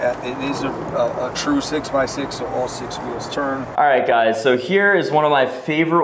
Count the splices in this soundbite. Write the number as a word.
one